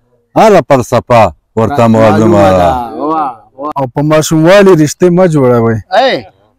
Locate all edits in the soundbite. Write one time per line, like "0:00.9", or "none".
0:03.6